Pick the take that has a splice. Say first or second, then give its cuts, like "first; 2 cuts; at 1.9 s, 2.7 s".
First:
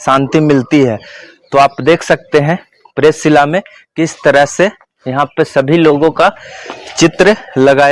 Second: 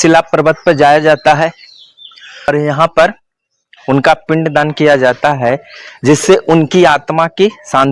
second; 1 cut; at 2.5 s